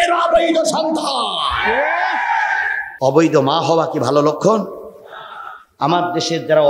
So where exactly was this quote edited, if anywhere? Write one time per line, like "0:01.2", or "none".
0:02.8